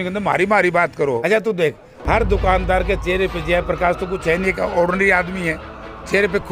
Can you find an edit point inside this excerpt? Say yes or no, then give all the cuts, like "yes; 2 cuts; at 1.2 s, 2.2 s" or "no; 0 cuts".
yes; 1 cut; at 1.2 s